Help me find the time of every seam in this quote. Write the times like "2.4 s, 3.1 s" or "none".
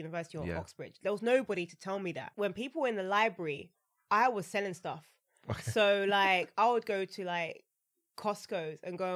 2.2 s